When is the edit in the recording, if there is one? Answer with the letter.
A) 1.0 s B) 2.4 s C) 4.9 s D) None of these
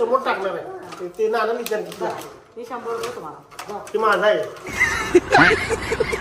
C